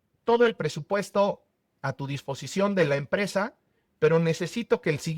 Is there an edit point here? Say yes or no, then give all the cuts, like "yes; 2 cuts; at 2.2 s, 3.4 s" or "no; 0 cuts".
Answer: no; 0 cuts